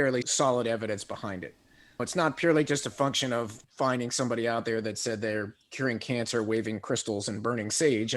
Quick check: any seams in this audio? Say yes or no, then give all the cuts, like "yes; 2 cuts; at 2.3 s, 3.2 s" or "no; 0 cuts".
yes; 1 cut; at 3.6 s